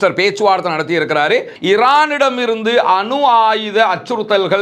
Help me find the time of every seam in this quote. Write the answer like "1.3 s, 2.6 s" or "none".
1.5 s